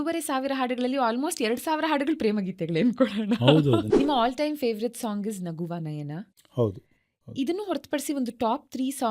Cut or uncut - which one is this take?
cut